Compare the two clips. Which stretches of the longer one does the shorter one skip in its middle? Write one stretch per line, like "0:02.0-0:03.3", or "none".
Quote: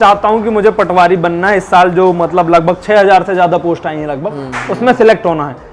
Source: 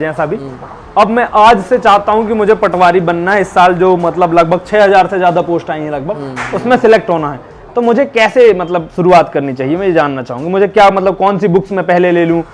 none